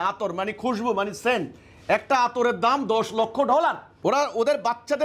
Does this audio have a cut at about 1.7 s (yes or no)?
no